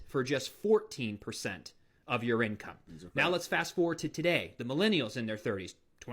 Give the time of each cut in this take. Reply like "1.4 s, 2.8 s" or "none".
3.1 s